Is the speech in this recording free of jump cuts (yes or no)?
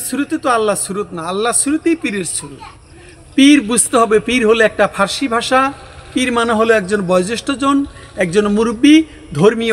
yes